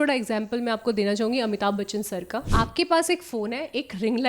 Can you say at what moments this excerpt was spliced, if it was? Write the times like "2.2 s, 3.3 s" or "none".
2.5 s